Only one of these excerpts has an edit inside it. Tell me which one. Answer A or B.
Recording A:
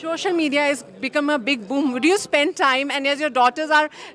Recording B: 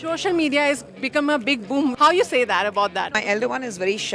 B